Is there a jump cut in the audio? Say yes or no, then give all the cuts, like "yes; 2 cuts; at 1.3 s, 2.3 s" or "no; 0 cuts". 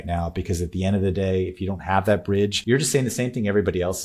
yes; 1 cut; at 2.6 s